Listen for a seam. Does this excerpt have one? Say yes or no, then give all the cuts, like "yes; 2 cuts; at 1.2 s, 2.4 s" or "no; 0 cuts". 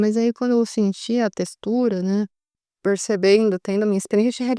yes; 1 cut; at 2.6 s